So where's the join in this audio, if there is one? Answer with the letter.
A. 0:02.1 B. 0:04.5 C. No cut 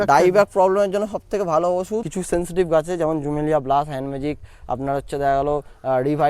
A